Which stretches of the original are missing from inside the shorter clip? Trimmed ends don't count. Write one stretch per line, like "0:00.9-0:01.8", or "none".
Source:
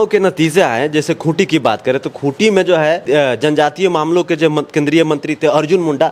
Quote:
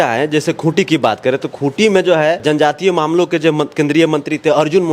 0:03.0-0:03.4

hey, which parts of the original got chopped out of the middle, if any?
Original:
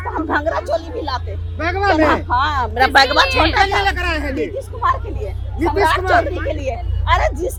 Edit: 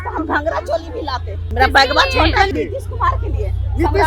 0:01.5-0:02.7
0:03.7-0:04.3

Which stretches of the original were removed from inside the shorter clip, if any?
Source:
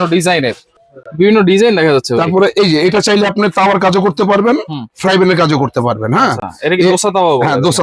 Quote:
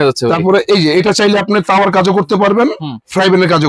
none

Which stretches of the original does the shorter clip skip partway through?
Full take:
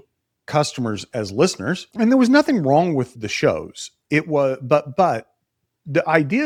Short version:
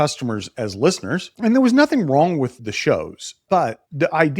0:03.9-0:05.3

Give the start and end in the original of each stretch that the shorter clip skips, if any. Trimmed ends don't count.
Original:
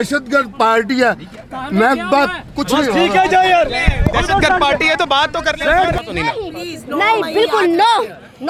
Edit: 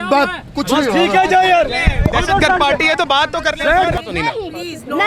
none

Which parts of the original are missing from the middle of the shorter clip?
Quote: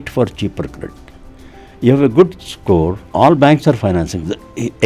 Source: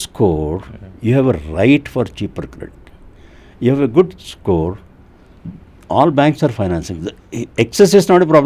0:04.8-0:05.8

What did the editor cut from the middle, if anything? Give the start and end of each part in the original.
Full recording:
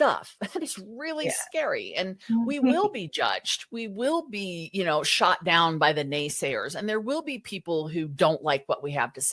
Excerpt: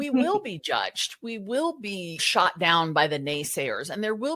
0:04.7-0:05.1

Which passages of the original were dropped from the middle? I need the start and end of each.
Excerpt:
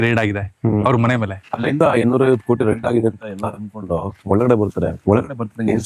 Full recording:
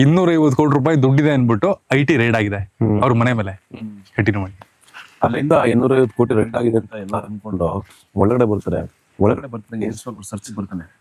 0:03.8-0:05.3
0:07.8-0:08.0
0:08.9-0:09.1

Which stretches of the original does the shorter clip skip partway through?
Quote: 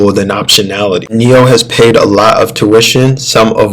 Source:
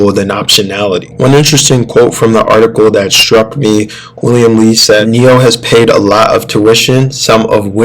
0:01.1-0:05.1

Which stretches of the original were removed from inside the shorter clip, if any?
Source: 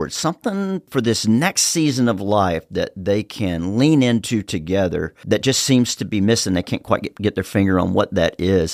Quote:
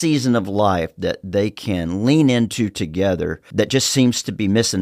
none

